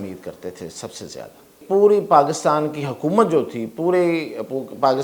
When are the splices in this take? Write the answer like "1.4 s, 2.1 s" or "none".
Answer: 1.6 s